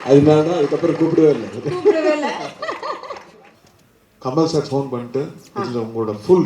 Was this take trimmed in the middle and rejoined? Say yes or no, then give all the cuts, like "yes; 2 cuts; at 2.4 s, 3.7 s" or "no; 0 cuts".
yes; 1 cut; at 3.4 s